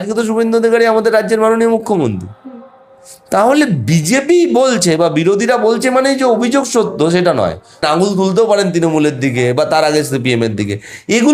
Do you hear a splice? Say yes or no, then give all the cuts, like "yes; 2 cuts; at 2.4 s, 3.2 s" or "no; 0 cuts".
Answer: yes; 1 cut; at 7.8 s